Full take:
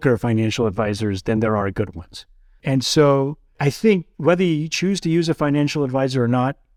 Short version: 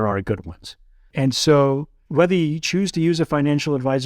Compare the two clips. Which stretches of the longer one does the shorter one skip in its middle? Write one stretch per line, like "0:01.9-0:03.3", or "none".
0:03.5-0:04.1